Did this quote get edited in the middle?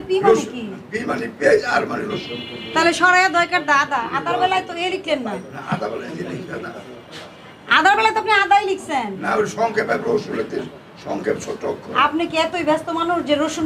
no; 0 cuts

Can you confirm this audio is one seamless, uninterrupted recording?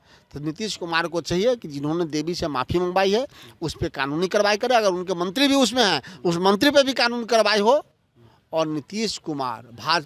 yes; 0 cuts

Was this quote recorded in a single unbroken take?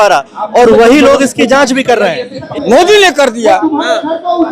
no; 1 cut; at 2.4 s

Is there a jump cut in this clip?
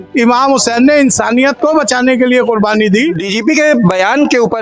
yes; 1 cut; at 3.3 s

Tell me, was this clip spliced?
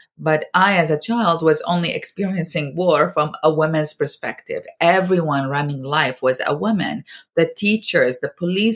no; 0 cuts

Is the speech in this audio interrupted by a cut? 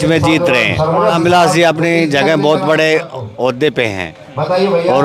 no; 0 cuts

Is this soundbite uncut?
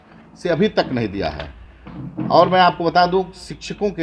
yes; 0 cuts

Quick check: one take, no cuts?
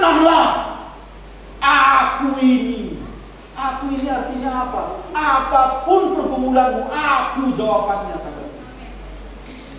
yes; 0 cuts

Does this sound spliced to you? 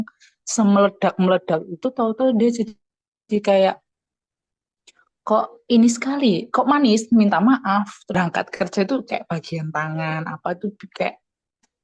yes; 1 cut; at 8.0 s

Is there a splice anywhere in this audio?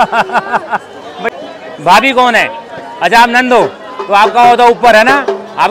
yes; 1 cut; at 1.2 s

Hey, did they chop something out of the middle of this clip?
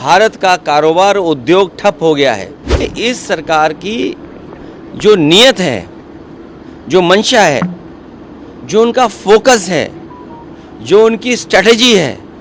yes; 1 cut; at 2.8 s

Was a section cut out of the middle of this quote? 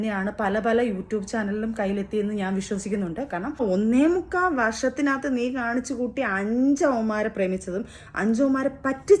yes; 1 cut; at 3.6 s

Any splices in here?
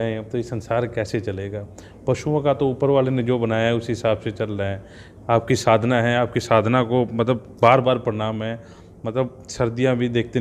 no; 0 cuts

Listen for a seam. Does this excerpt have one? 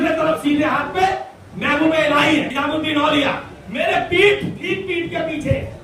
yes; 1 cut; at 2.5 s

